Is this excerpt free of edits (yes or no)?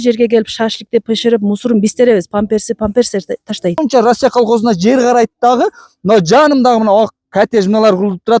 no